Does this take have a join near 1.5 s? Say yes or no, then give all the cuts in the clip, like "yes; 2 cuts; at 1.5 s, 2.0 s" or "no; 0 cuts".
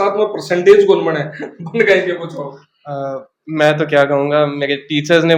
no; 0 cuts